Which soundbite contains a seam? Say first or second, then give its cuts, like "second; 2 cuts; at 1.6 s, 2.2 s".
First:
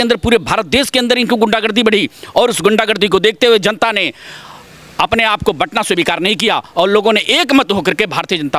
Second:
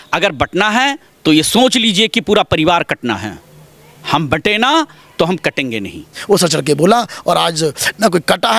second; 1 cut; at 6.1 s